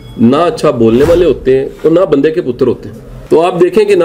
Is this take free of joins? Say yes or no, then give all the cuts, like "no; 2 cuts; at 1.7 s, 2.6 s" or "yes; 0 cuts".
no; 1 cut; at 3.1 s